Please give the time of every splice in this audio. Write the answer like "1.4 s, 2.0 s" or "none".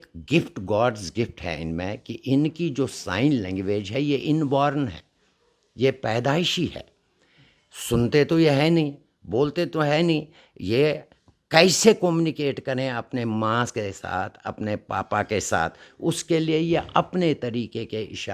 none